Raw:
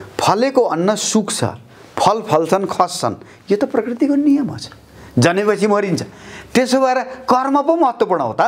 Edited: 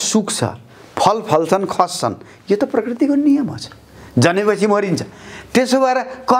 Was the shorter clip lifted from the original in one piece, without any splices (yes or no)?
yes